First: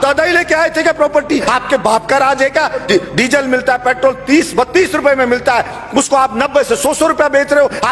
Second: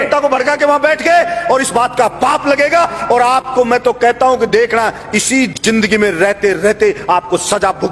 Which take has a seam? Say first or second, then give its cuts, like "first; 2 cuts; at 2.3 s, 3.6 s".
first; 2 cuts; at 1.4 s, 2.8 s